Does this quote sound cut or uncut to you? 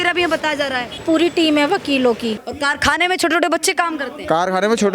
cut